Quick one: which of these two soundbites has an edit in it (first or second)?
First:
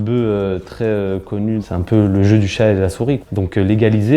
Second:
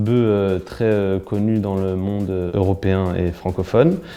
first